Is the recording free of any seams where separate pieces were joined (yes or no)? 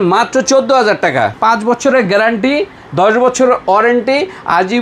no